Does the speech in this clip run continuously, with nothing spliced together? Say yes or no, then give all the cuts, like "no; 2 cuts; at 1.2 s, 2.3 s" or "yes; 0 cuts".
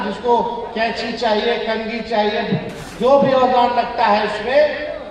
no; 1 cut; at 2.8 s